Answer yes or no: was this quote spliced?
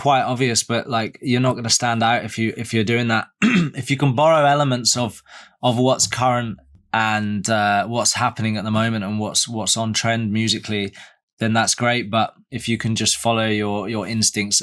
yes